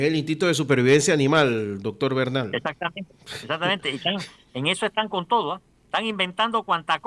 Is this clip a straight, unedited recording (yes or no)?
no